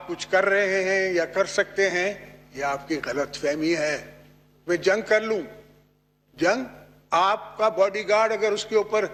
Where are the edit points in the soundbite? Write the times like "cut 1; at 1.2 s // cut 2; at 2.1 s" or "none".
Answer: none